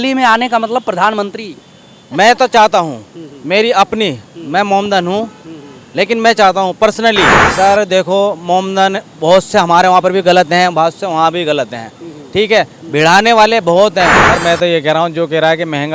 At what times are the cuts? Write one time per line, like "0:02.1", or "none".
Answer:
0:07.4
0:14.2